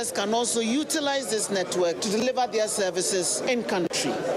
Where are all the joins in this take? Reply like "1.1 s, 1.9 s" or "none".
3.4 s